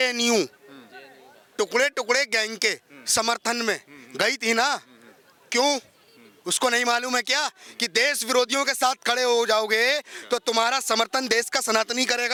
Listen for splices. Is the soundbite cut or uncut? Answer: uncut